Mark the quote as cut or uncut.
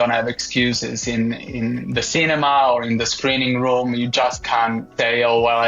uncut